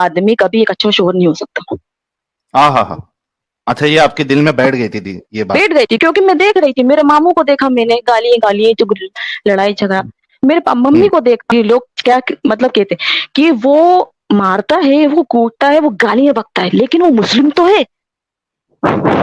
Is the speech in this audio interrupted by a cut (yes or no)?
yes